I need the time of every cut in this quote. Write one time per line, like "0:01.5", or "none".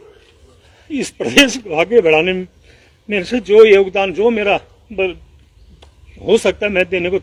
none